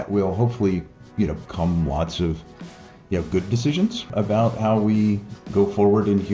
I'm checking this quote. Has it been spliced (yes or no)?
yes